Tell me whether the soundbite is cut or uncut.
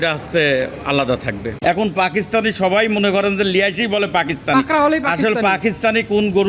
cut